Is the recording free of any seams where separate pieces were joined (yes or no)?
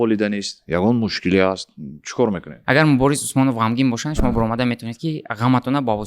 no